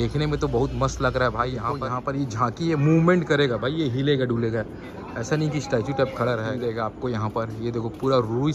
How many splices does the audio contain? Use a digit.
2